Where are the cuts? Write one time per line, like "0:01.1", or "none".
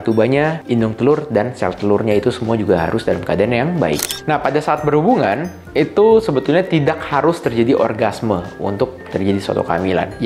0:04.1